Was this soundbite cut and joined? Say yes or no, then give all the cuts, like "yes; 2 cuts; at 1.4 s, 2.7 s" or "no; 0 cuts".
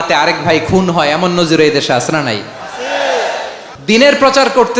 yes; 1 cut; at 3.7 s